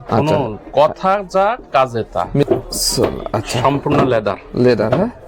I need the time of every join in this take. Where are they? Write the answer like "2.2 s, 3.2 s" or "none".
2.4 s